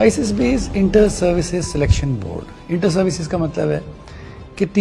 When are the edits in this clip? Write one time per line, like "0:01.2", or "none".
none

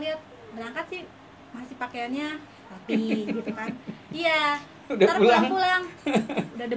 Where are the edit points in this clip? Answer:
none

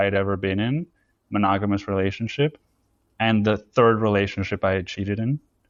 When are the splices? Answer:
none

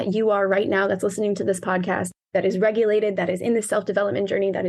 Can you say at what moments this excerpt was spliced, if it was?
0:02.1

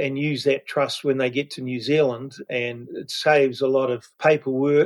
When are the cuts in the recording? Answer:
none

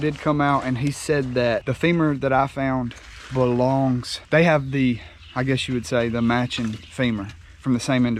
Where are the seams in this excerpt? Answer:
0:01.7
0:04.1

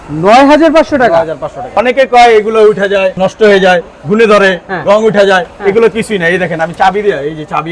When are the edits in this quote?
0:01.7
0:03.2

